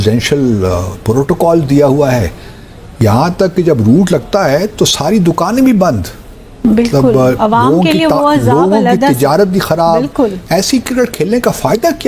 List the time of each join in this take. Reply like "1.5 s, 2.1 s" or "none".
none